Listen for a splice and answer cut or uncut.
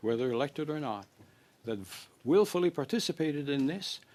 uncut